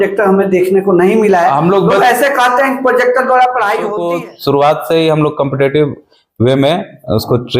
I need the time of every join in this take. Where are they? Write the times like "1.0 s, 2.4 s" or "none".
4.0 s